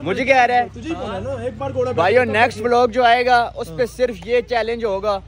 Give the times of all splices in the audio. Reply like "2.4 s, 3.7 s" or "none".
none